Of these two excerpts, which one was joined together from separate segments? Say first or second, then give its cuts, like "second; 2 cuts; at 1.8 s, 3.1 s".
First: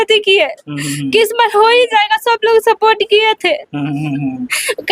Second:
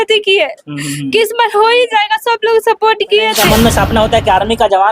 second; 1 cut; at 3.4 s